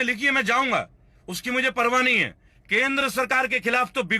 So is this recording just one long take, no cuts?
no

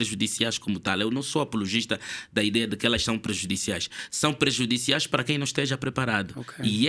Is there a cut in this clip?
no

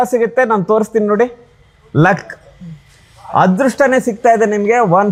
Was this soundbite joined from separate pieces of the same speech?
no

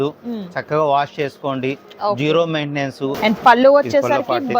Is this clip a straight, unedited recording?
no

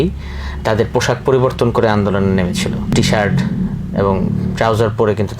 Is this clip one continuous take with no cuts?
no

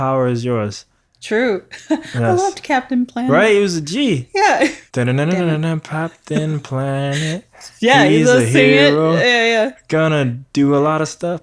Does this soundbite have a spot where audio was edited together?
yes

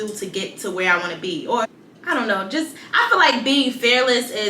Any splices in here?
yes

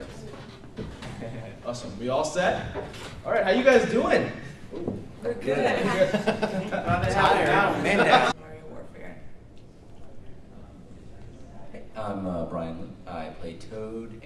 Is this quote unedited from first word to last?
yes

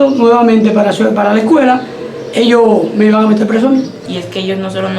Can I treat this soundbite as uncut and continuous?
no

